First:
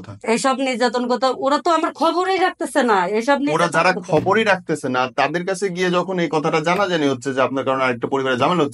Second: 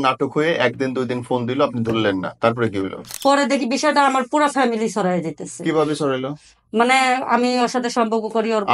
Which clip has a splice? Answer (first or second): second